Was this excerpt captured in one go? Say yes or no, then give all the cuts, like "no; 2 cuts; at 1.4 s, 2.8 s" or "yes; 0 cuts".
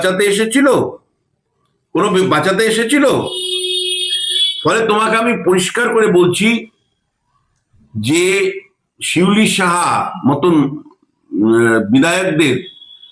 yes; 0 cuts